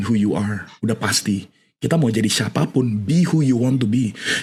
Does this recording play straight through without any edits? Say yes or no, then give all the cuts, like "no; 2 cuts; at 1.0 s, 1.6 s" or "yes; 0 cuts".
yes; 0 cuts